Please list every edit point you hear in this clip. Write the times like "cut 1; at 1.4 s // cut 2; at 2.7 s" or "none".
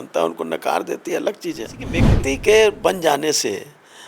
cut 1; at 2.0 s